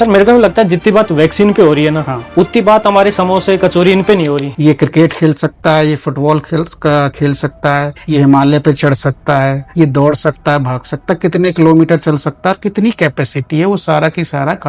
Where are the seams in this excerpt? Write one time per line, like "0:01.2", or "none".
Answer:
0:04.5

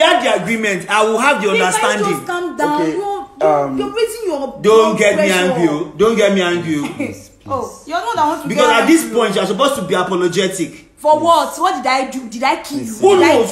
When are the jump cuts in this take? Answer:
none

